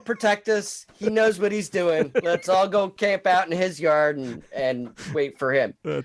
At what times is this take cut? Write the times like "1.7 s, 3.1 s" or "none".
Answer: none